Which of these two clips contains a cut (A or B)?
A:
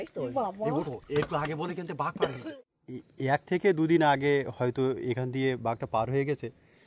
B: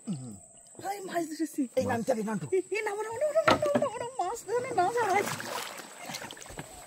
A